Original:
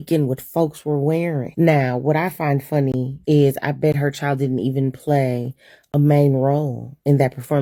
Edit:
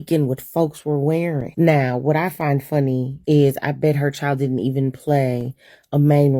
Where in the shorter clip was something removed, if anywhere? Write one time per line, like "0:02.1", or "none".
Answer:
none